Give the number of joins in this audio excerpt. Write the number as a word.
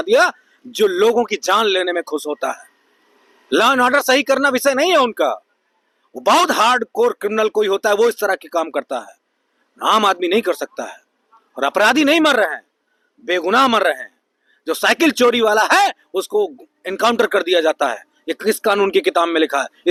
zero